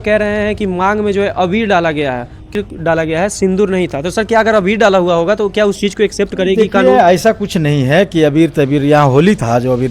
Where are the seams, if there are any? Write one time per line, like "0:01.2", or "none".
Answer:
0:02.5